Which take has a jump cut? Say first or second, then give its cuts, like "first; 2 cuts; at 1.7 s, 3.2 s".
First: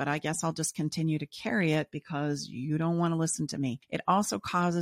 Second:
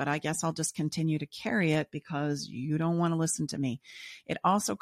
first; 1 cut; at 3.9 s